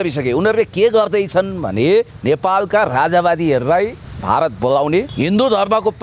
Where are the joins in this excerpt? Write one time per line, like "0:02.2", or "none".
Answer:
0:02.1
0:04.1
0:05.1